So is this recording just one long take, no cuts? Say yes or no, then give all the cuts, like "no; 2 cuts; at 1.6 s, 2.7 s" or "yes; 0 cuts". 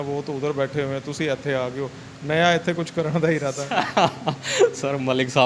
yes; 0 cuts